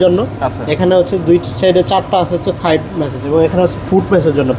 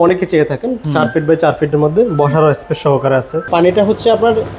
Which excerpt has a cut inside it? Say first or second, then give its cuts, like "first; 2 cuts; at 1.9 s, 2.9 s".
second; 1 cut; at 3.4 s